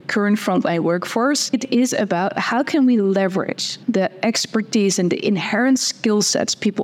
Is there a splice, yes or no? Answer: yes